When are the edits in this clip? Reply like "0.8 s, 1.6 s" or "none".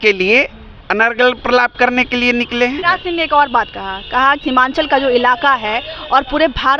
2.8 s, 4.4 s